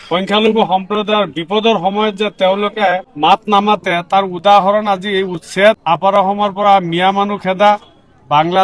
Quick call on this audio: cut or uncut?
cut